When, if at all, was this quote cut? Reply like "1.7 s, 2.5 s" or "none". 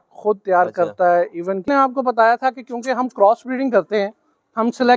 1.7 s

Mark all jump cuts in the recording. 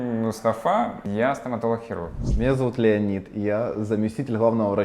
1.0 s

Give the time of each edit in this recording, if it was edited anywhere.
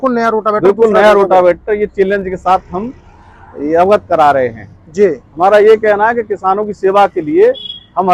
none

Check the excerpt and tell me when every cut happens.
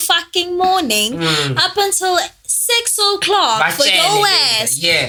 none

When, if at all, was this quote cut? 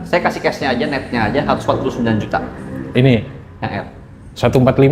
none

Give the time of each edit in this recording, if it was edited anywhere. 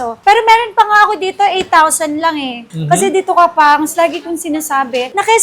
2.8 s

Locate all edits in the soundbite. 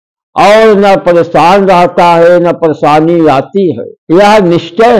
3.9 s

